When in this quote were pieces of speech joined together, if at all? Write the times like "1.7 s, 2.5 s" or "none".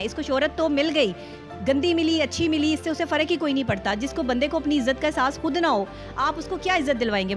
none